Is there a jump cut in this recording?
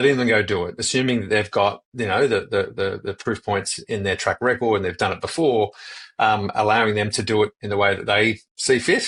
no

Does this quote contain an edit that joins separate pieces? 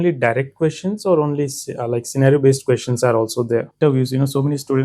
yes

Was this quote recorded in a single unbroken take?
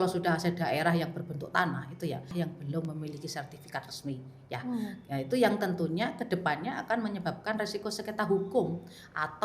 no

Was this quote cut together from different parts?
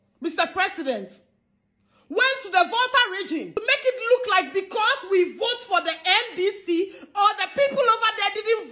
yes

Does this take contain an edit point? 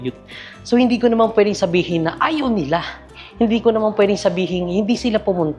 no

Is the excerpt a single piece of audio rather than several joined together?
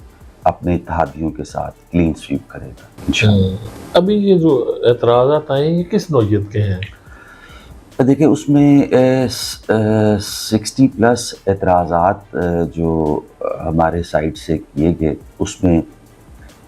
yes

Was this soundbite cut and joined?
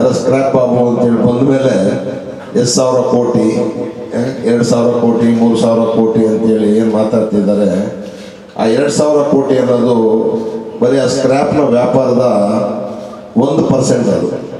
no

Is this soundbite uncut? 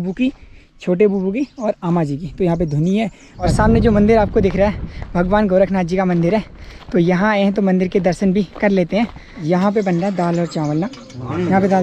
no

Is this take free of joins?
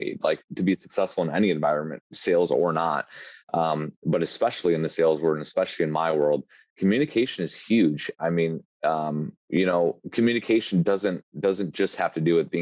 yes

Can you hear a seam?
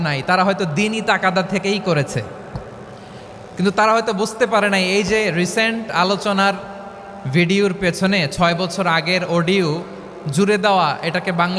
no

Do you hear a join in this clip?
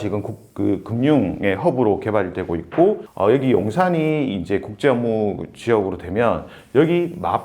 yes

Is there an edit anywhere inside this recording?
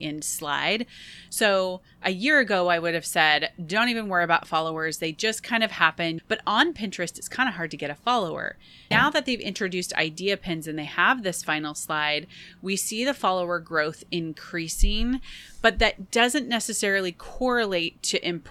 yes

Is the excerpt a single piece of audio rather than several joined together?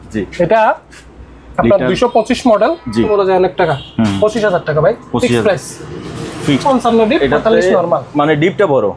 no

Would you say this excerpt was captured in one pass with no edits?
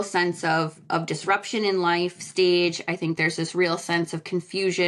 yes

